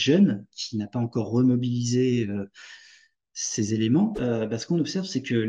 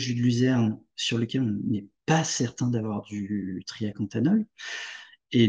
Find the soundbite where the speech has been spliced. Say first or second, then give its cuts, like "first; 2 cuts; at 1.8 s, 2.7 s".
first; 1 cut; at 4.2 s